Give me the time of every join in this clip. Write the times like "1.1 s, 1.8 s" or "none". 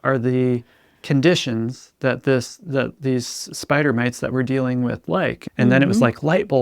5.4 s